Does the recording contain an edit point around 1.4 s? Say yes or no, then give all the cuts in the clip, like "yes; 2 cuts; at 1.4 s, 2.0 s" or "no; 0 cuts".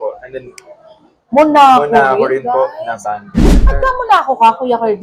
no; 1 cut; at 3.5 s